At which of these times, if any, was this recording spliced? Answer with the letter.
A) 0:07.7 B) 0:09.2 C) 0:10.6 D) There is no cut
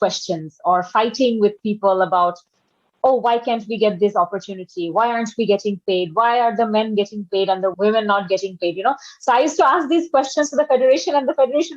A